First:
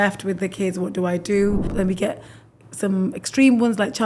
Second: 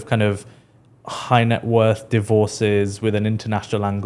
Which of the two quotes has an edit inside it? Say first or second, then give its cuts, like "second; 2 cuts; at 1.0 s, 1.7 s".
first; 1 cut; at 1.7 s